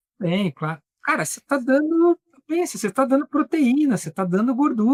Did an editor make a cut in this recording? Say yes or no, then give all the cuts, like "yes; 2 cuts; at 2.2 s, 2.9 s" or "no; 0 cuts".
no; 0 cuts